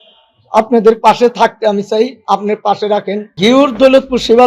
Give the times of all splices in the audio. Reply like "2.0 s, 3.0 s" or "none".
3.3 s